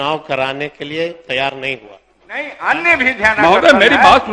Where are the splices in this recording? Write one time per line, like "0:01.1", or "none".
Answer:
0:02.5